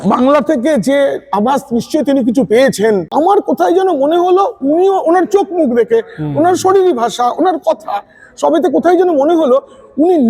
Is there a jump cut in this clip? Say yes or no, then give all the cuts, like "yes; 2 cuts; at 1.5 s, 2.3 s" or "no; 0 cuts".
yes; 1 cut; at 3.1 s